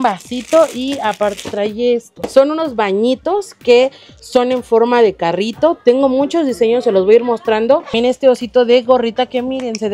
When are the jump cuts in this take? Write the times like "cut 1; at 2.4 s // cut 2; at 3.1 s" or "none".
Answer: cut 1; at 2.3 s // cut 2; at 7.9 s